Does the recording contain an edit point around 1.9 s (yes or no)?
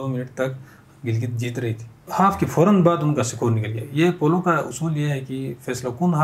yes